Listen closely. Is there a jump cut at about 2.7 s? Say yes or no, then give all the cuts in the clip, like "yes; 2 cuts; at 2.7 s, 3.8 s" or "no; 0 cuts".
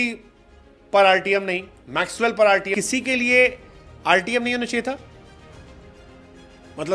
yes; 1 cut; at 2.7 s